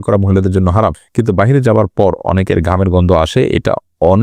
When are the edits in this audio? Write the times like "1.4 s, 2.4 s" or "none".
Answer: 1.1 s